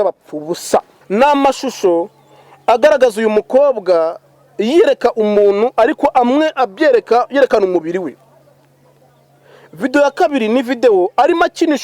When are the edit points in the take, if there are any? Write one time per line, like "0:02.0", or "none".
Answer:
0:01.0